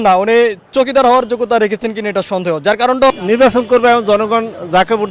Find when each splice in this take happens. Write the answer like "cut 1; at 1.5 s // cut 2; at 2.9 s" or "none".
cut 1; at 3.1 s